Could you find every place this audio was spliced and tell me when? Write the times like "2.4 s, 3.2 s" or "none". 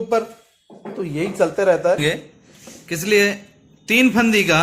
2.0 s